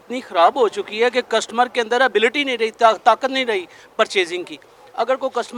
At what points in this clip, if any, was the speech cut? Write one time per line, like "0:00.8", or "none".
none